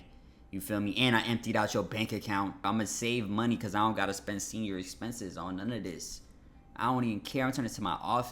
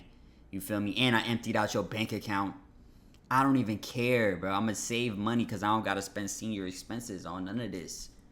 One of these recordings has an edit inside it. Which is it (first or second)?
first